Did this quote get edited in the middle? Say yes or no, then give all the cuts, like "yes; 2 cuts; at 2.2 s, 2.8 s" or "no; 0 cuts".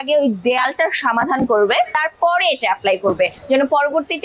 no; 0 cuts